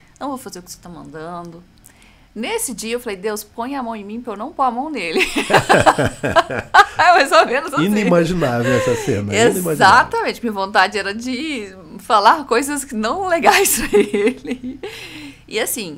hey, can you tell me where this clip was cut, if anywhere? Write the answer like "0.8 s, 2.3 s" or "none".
none